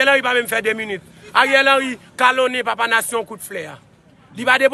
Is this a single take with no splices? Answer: yes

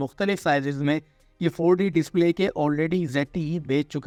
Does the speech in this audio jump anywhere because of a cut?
no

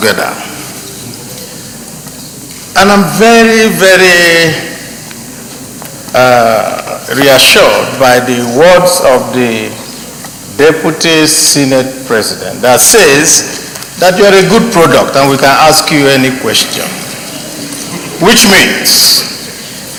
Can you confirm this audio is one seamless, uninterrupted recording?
yes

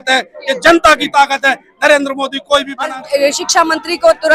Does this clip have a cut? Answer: yes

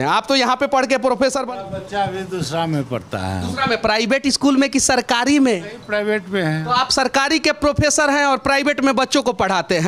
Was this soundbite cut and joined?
yes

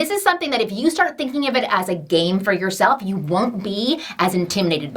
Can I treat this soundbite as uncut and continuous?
yes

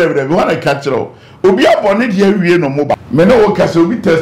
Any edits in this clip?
yes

